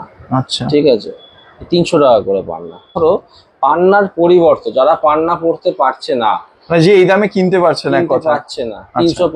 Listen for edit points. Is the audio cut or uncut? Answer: cut